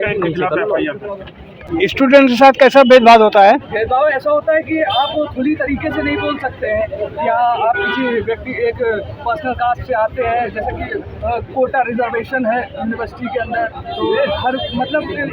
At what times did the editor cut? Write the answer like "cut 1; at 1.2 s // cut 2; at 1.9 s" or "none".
cut 1; at 1.7 s

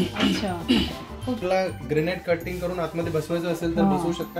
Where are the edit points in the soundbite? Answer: cut 1; at 1.4 s

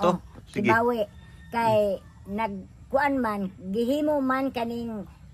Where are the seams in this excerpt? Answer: none

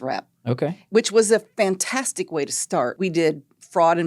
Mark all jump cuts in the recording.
cut 1; at 2.9 s

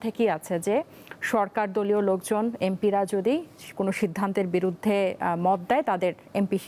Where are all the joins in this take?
none

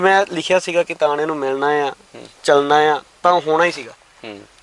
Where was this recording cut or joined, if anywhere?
none

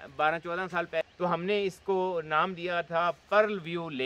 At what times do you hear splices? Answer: cut 1; at 1.1 s

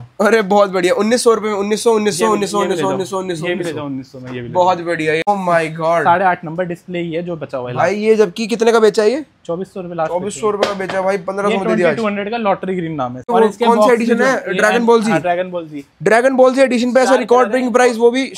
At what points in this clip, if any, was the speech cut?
cut 1; at 5.3 s // cut 2; at 13.2 s

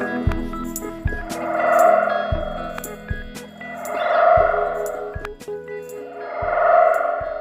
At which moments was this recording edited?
none

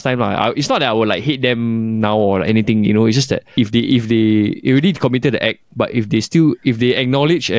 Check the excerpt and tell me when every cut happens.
cut 1; at 3.5 s

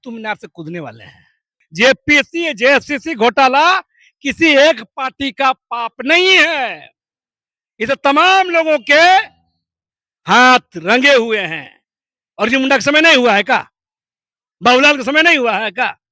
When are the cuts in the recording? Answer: cut 1; at 1.6 s

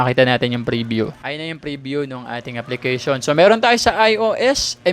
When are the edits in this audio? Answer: cut 1; at 1.1 s

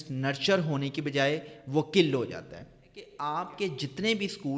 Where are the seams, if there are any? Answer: cut 1; at 3.1 s

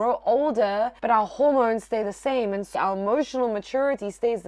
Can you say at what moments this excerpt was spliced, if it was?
cut 1; at 1.0 s // cut 2; at 2.7 s

